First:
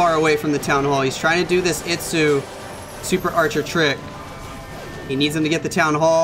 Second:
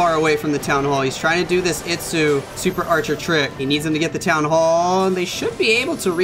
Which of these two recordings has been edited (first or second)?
second